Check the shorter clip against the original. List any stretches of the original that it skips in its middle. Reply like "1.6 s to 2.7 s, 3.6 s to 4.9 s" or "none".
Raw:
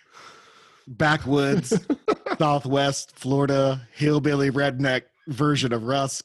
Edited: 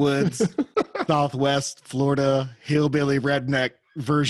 none